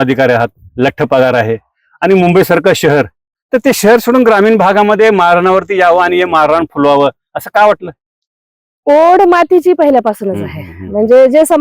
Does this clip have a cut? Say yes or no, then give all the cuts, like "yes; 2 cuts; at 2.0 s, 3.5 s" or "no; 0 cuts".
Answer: no; 0 cuts